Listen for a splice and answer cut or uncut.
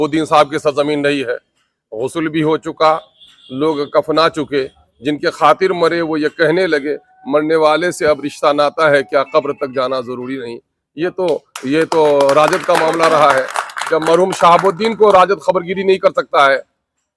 uncut